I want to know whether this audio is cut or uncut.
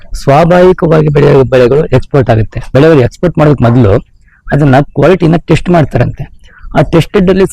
cut